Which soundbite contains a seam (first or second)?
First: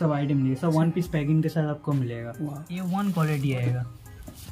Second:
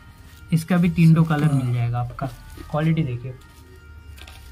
first